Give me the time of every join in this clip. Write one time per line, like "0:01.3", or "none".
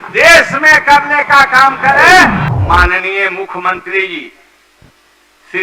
0:02.5